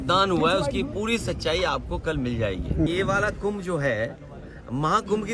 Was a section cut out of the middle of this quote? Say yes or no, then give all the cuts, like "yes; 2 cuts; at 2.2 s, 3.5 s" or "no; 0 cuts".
yes; 1 cut; at 2.9 s